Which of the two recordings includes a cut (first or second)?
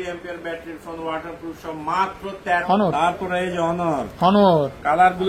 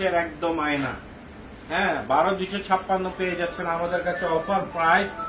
first